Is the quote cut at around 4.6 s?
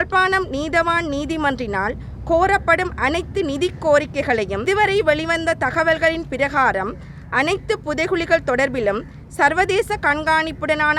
yes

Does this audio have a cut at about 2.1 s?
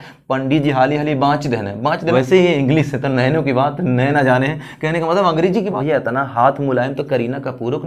yes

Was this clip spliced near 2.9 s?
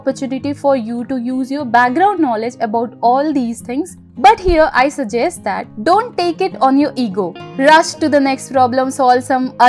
no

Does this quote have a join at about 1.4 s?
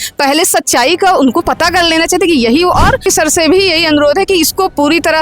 no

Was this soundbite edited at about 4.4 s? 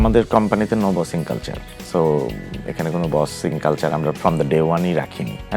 no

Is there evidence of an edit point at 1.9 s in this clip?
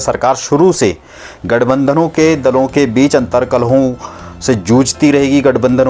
no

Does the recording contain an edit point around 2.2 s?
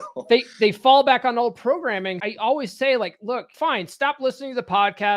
yes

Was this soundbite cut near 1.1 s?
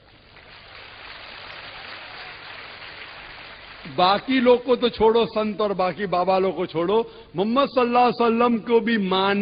no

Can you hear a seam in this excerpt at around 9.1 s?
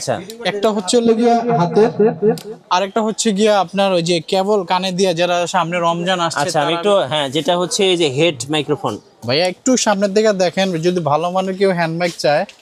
yes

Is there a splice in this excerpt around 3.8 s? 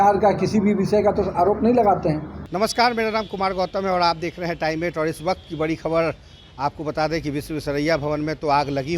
no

